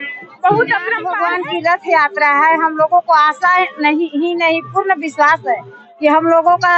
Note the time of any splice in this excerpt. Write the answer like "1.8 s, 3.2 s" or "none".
1.1 s